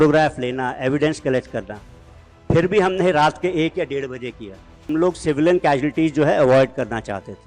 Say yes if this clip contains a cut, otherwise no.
yes